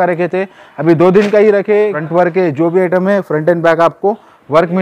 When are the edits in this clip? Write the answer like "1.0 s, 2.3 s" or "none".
2.0 s